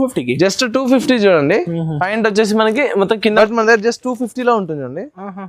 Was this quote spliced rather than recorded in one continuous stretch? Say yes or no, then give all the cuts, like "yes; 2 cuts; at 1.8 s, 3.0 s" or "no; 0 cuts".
yes; 1 cut; at 3.3 s